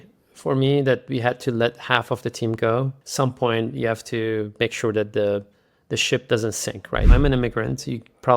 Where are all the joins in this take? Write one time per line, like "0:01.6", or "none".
0:03.0
0:07.1